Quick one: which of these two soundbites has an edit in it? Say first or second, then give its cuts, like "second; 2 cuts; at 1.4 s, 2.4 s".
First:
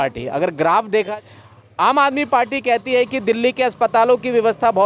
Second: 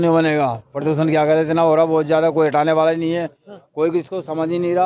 first; 1 cut; at 1.1 s